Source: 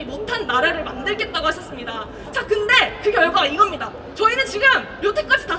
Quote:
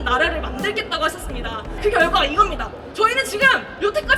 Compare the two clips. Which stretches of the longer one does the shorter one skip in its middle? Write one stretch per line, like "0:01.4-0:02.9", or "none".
0:02.2-0:03.0